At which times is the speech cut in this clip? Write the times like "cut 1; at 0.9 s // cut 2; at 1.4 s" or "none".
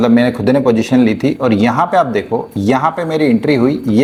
none